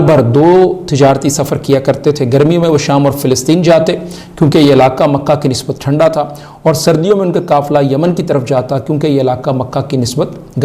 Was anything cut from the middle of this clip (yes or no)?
no